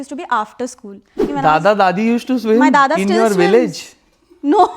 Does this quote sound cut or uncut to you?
cut